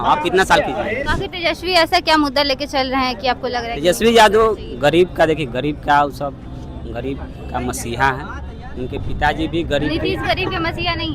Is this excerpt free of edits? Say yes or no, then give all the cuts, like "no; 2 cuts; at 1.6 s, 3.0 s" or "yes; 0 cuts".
no; 1 cut; at 1.0 s